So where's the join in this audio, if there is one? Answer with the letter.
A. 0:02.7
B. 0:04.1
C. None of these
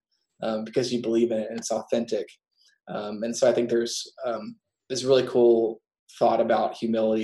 C